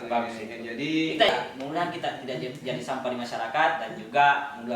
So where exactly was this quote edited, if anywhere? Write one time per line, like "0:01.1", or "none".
0:01.3